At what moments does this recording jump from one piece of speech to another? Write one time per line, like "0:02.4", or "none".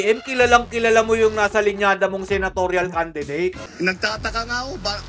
0:03.7